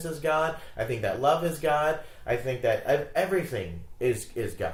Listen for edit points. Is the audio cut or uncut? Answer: uncut